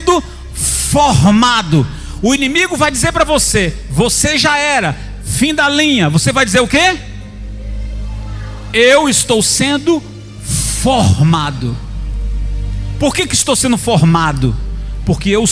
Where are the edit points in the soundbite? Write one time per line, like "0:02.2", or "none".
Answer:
none